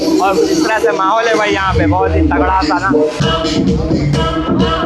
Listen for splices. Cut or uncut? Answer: cut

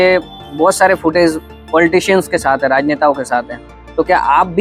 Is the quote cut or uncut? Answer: uncut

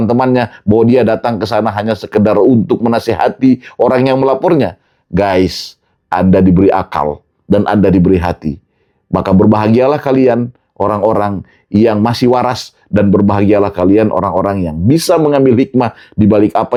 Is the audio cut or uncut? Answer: uncut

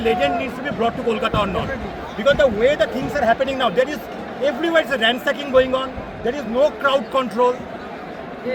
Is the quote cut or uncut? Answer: uncut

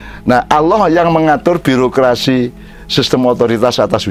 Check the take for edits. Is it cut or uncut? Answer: uncut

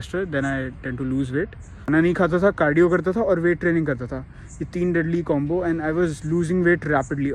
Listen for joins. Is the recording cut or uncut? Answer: cut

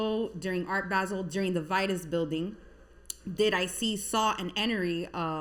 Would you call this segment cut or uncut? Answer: uncut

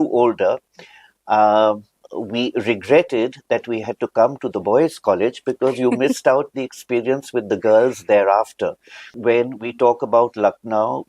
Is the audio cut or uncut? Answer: cut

